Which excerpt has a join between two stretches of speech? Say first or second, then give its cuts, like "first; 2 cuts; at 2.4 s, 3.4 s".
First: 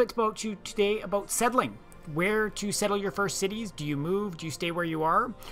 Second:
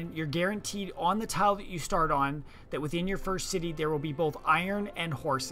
second; 1 cut; at 3.7 s